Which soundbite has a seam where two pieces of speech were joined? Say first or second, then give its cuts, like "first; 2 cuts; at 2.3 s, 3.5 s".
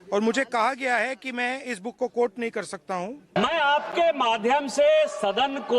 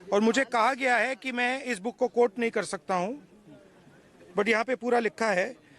first; 1 cut; at 3.4 s